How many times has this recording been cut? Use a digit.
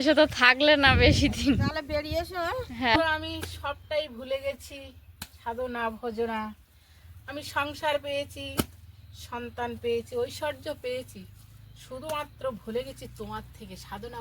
1